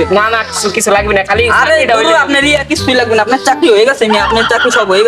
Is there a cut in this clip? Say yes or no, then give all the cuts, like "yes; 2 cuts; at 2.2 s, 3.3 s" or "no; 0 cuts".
no; 0 cuts